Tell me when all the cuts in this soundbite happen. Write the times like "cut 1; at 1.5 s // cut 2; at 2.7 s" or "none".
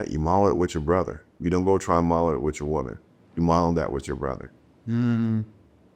cut 1; at 1.2 s